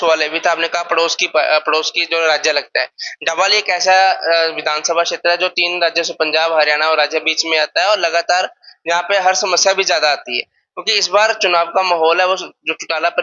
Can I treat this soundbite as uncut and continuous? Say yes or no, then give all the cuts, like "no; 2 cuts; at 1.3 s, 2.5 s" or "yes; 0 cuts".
yes; 0 cuts